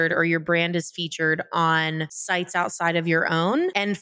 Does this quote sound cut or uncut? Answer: uncut